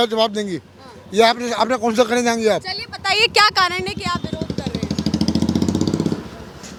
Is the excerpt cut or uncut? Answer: uncut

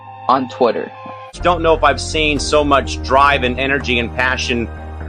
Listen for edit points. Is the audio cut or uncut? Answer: uncut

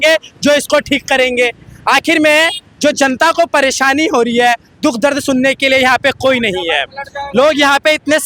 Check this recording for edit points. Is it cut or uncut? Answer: uncut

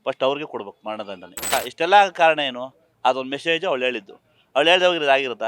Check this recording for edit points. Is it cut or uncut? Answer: cut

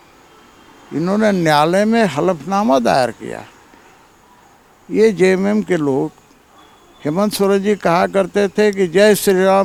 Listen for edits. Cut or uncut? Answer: uncut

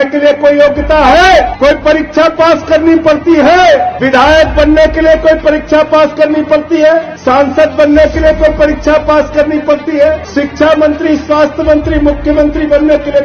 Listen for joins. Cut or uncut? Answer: cut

